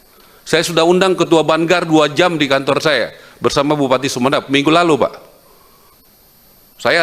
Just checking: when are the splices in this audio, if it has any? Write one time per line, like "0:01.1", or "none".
0:05.9